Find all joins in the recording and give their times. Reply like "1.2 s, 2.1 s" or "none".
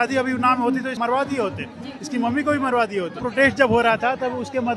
1.0 s, 3.2 s